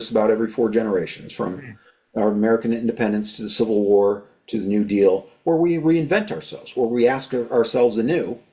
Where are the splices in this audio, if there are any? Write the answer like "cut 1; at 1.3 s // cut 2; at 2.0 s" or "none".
none

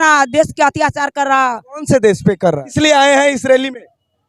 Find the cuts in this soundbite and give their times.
cut 1; at 2.7 s

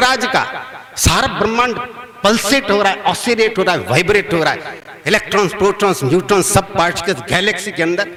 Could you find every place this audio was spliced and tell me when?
none

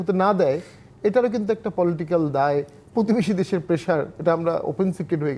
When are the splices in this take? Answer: none

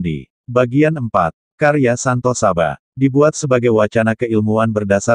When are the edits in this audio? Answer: cut 1; at 1.0 s

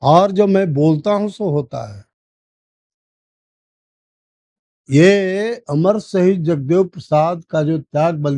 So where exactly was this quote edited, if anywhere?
none

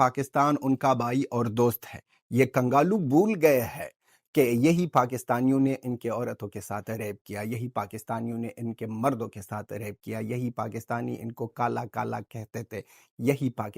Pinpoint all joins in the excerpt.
none

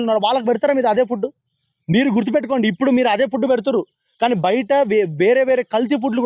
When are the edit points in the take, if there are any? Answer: none

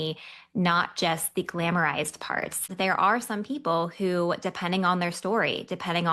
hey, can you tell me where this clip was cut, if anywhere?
cut 1; at 2.7 s

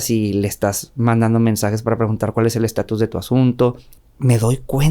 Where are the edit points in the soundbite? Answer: cut 1; at 4.0 s

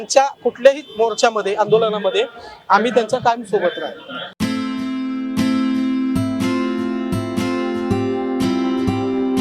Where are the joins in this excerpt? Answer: none

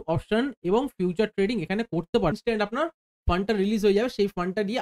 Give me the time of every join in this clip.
cut 1; at 2.3 s

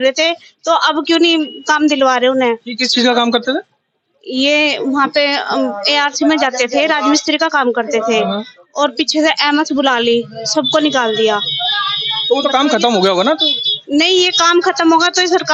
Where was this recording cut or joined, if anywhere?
none

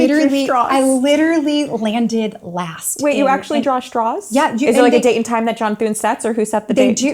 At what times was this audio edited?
none

